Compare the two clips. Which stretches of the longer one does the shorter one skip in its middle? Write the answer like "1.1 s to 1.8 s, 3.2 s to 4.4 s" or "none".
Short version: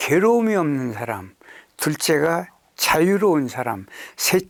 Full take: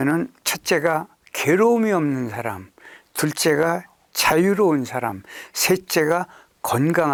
none